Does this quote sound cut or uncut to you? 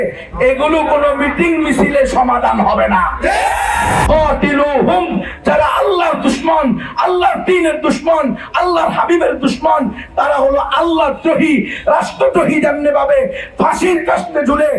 cut